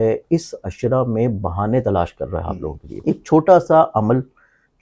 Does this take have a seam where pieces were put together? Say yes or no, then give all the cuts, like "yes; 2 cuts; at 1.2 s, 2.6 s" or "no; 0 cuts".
yes; 1 cut; at 2.9 s